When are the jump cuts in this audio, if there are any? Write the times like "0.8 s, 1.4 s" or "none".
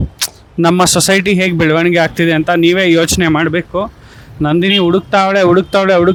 none